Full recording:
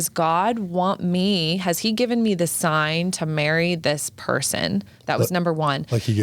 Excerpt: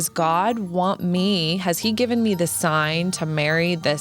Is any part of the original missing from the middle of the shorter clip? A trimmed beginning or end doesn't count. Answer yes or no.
no